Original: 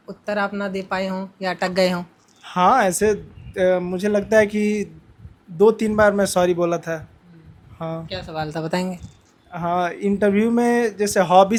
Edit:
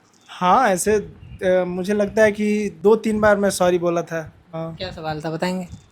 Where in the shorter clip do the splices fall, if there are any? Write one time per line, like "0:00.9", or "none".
0:02.7
0:04.4